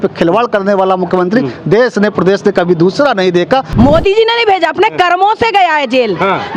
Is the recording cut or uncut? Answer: cut